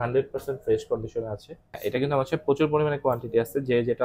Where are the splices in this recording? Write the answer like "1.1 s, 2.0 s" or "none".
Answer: 1.8 s

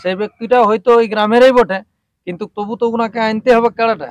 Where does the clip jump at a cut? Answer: none

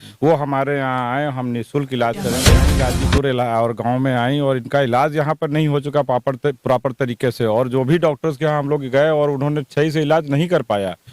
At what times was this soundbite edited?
2.7 s

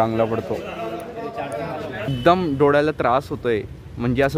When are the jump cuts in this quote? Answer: 2.1 s

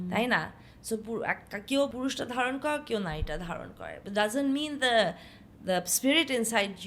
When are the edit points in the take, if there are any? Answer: 1.9 s

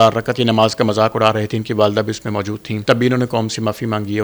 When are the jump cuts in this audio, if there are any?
2.7 s

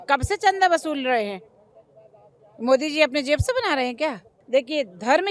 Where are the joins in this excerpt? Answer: 4.3 s

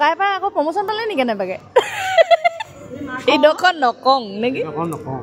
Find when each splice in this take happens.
none

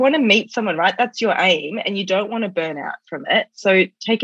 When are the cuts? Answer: none

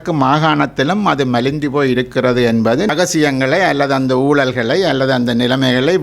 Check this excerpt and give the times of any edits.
2.9 s

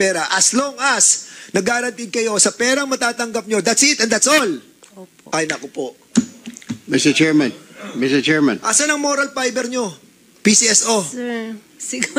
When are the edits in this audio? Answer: none

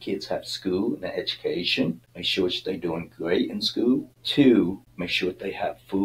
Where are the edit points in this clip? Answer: 2.1 s, 4.2 s, 4.9 s

